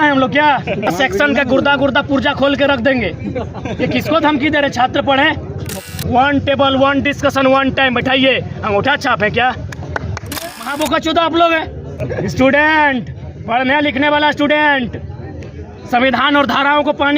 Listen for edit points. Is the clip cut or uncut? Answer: cut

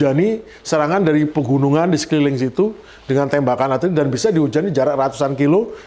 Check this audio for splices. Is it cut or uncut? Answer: uncut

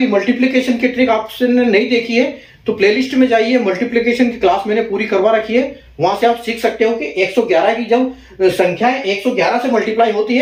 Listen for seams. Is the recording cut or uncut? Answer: uncut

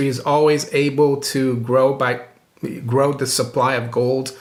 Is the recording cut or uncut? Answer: uncut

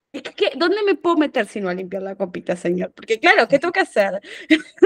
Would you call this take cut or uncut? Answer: uncut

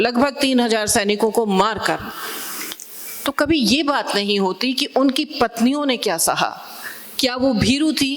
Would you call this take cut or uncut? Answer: uncut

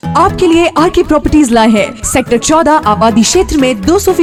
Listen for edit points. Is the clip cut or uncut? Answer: uncut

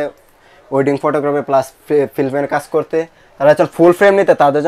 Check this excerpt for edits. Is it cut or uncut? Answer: uncut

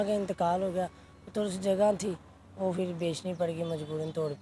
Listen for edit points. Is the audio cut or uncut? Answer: uncut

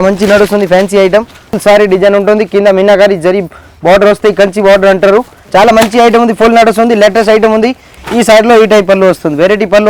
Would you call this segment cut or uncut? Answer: cut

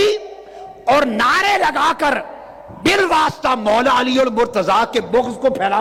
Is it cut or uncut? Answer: uncut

